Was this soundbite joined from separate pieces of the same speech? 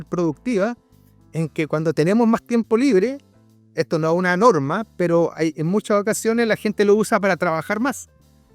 no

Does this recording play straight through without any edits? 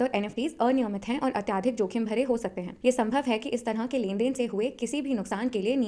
yes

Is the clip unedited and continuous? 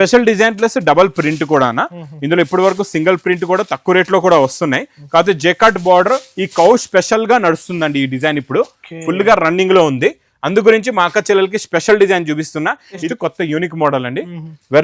no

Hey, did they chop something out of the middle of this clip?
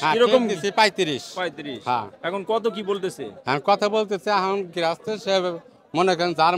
no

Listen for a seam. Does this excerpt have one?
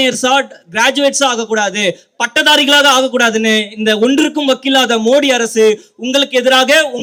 no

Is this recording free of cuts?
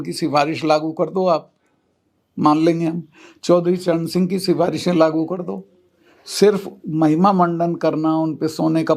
yes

